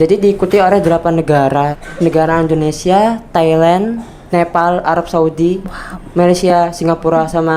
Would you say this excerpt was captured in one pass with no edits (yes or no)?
no